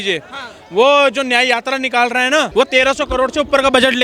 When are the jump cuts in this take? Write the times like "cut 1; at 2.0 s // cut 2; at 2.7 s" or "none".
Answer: cut 1; at 2.5 s